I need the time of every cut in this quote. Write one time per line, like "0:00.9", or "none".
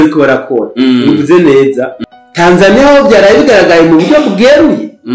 0:01.9